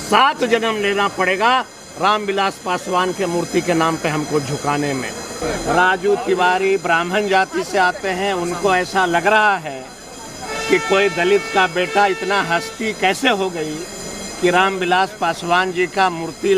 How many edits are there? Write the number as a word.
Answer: one